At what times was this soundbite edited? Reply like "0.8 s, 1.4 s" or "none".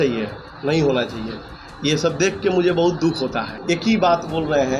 3.5 s